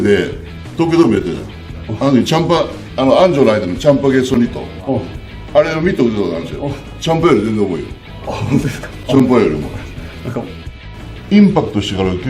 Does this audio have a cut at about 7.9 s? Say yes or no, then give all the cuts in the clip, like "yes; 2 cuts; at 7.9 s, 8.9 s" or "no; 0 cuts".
no; 1 cut; at 10.7 s